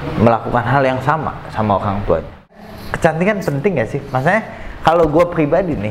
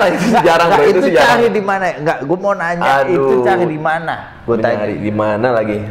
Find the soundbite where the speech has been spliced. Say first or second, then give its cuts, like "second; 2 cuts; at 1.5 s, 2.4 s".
first; 1 cut; at 2.7 s